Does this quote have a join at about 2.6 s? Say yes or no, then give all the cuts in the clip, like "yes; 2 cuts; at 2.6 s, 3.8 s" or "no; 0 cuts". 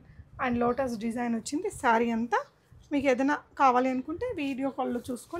no; 0 cuts